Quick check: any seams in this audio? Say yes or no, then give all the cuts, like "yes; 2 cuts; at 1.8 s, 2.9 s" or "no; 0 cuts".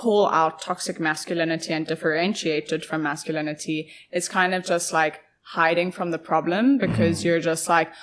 no; 0 cuts